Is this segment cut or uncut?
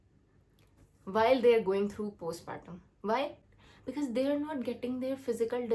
uncut